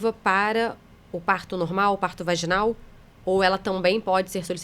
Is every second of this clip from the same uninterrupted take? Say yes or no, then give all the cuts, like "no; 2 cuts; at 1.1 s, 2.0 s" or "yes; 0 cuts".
yes; 0 cuts